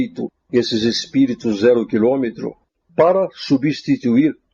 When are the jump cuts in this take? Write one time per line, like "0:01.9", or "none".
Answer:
0:02.7